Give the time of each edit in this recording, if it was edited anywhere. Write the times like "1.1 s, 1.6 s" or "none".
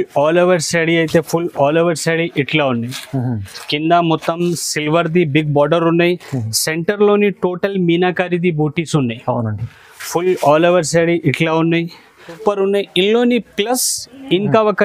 12.4 s